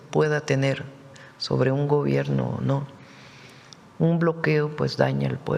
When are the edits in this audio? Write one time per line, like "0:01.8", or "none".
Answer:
none